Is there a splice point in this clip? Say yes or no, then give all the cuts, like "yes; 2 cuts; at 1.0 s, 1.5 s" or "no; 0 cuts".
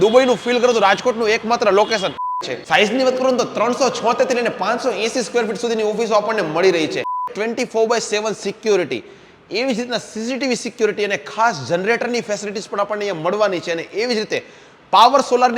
yes; 2 cuts; at 2.4 s, 7.3 s